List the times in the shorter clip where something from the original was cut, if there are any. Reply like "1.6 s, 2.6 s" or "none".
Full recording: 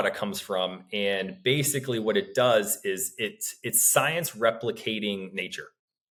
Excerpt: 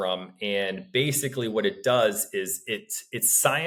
none